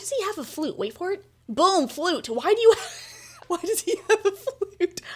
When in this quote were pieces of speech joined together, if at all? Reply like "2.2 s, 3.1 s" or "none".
3.4 s